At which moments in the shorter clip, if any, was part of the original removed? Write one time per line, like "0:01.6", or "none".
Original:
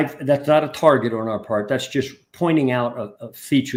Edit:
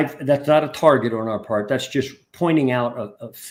none

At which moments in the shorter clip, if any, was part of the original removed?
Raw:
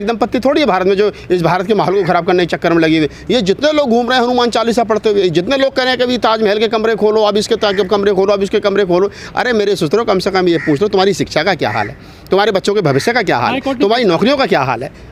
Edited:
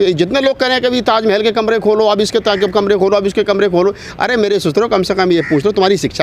none

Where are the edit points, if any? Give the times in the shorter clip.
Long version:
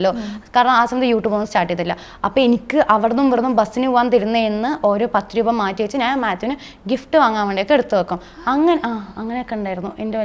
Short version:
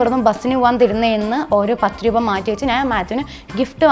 none

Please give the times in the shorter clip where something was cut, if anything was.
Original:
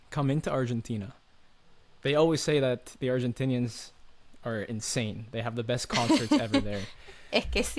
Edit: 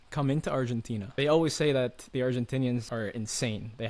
0:01.1
0:02.9

